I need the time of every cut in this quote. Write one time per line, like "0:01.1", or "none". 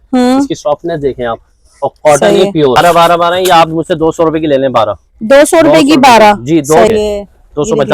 0:02.8
0:06.9